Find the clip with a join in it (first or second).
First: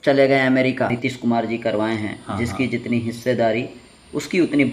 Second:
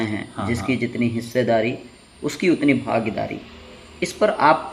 first